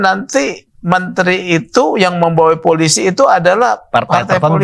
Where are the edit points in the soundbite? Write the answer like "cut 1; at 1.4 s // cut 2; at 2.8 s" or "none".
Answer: none